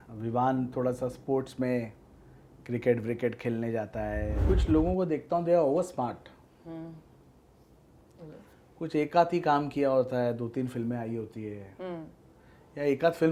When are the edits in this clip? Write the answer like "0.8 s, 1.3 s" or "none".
4.3 s